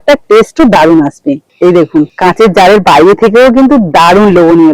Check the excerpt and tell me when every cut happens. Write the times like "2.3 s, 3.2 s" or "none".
1.5 s